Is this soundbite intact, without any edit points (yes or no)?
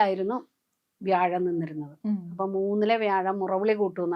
yes